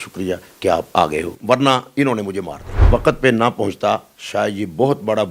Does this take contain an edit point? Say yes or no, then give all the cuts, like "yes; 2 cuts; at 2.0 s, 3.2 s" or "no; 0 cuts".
yes; 1 cut; at 2.7 s